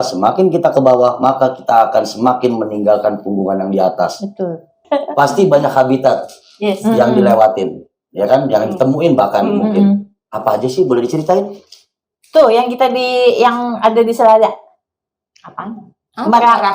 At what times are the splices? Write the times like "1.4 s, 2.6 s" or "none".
4.8 s